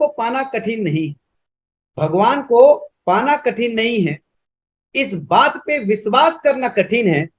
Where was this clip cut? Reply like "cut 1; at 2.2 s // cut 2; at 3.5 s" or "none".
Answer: none